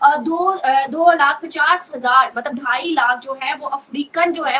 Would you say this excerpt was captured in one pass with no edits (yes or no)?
yes